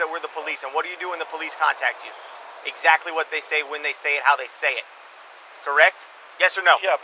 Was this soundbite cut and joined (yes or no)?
no